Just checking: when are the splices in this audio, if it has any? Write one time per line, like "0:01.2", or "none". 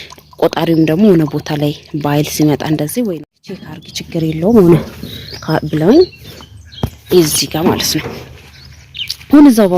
0:03.8